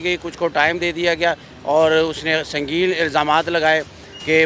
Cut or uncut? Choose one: cut